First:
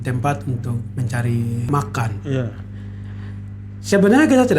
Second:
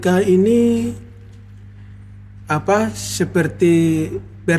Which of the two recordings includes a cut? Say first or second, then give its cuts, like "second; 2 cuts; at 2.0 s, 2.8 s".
first; 1 cut; at 1.7 s